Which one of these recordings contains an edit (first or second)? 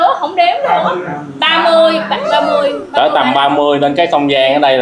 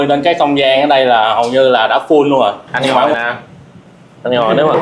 second